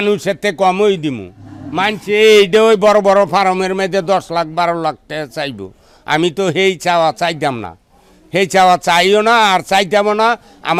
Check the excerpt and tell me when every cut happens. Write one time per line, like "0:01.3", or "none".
none